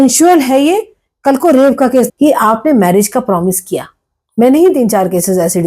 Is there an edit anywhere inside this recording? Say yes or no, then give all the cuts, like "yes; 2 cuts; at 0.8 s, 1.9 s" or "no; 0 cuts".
yes; 1 cut; at 2.1 s